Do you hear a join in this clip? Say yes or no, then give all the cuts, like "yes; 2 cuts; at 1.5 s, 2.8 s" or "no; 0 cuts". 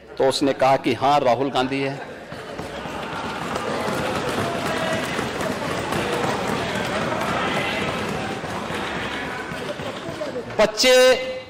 no; 0 cuts